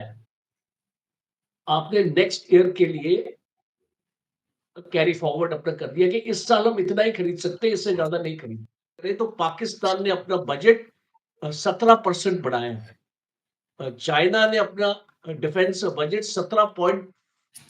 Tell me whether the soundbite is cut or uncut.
cut